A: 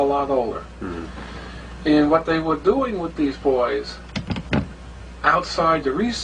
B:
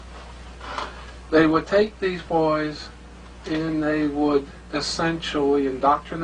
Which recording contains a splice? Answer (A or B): A